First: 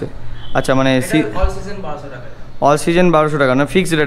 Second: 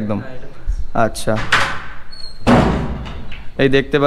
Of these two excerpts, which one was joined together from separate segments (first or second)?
second